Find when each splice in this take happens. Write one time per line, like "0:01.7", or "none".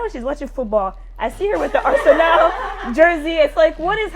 none